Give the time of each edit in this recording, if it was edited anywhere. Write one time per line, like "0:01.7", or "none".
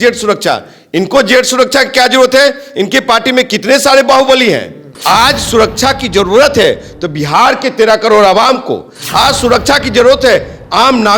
0:04.9